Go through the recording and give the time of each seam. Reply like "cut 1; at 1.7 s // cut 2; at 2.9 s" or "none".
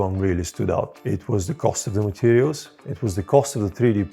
cut 1; at 1.0 s